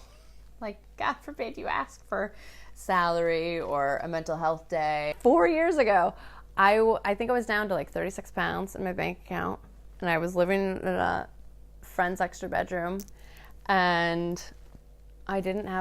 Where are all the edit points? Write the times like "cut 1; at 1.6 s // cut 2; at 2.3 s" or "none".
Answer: cut 1; at 5.1 s